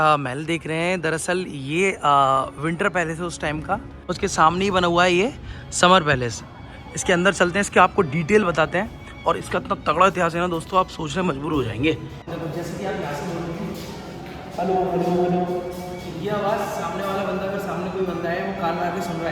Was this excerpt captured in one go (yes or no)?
no